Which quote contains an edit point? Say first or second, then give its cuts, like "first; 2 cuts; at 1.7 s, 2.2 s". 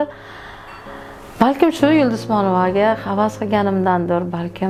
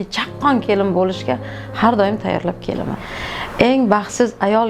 second; 1 cut; at 3.0 s